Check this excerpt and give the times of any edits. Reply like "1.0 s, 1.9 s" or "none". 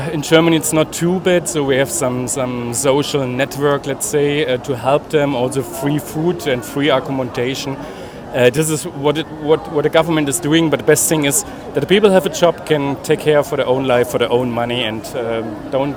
none

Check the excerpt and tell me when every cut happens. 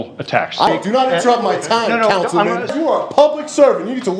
0.7 s, 2.7 s

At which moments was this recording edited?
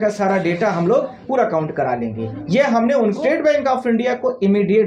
3.2 s

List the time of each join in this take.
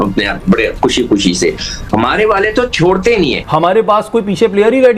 3.5 s

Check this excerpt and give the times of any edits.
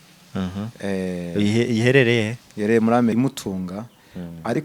3.1 s

